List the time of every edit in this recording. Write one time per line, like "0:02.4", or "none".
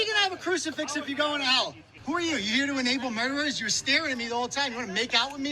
0:01.9